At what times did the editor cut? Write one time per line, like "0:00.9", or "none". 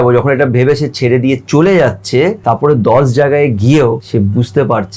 0:02.4
0:04.0